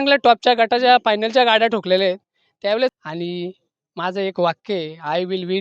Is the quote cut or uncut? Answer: cut